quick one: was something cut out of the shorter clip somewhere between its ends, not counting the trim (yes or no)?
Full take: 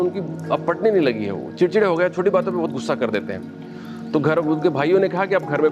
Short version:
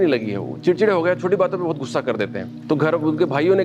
yes